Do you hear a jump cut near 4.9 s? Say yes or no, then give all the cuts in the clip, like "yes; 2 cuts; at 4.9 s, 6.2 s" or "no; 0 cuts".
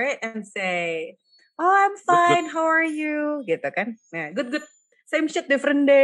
yes; 1 cut; at 4.9 s